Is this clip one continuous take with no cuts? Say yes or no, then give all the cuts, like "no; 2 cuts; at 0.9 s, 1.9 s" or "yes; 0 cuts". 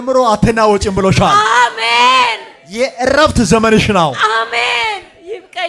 yes; 0 cuts